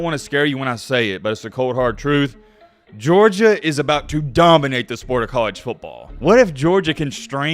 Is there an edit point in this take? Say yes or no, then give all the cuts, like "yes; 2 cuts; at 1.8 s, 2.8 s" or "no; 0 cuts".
yes; 1 cut; at 6.0 s